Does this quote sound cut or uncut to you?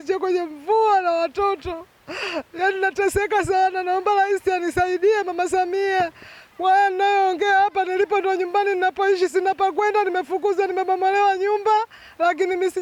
uncut